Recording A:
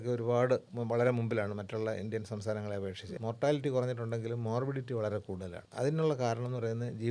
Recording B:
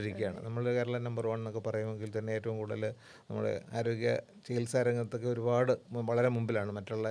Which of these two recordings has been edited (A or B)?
A